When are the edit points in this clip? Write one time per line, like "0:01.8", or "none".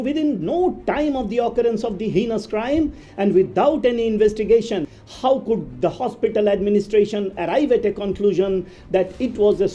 0:04.9